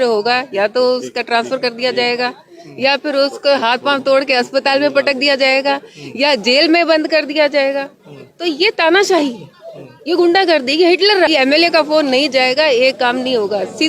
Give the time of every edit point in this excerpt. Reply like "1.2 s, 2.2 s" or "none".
11.3 s

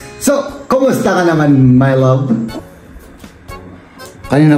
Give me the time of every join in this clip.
2.6 s

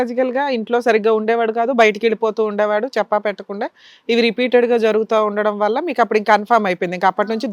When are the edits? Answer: none

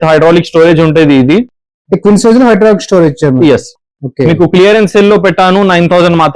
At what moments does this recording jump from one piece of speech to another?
none

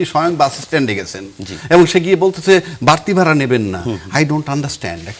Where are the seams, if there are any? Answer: none

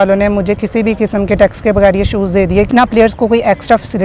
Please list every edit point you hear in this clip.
2.7 s

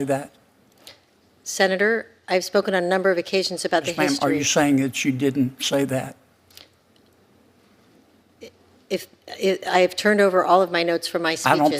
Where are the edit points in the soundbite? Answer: none

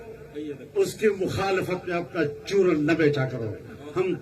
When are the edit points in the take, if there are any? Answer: none

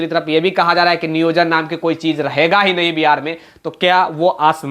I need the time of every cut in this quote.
none

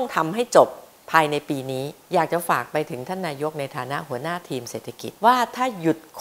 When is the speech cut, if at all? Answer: 2.0 s, 5.1 s

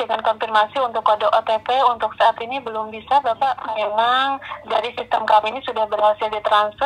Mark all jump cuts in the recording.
3.6 s

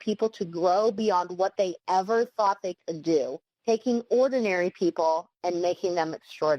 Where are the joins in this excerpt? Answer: 3.5 s

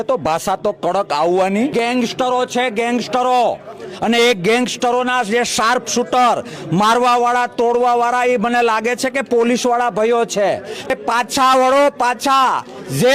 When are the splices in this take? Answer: 1.7 s, 10.9 s

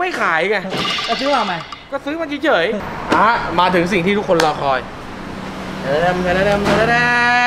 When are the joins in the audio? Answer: 2.8 s

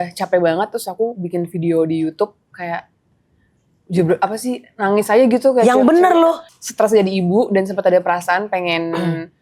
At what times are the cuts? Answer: 6.5 s

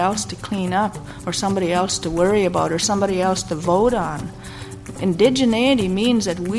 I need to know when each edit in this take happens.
4.9 s

